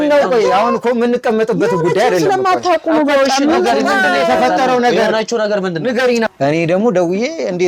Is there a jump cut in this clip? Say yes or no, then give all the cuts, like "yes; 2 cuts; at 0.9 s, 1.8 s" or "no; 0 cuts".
yes; 1 cut; at 6.3 s